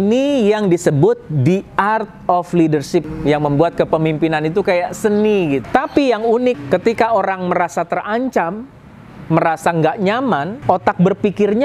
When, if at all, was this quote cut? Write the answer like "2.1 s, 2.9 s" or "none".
3.1 s, 5.6 s, 6.6 s, 10.5 s